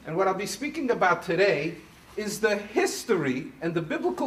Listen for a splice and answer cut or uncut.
uncut